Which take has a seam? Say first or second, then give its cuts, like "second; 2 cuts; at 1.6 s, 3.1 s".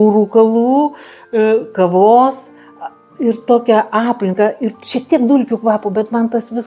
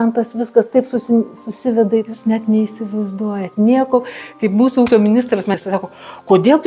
second; 2 cuts; at 2.1 s, 5.6 s